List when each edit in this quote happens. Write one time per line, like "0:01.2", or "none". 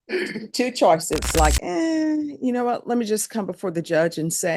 0:01.4